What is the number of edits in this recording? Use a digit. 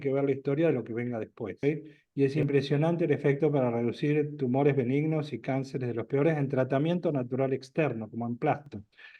1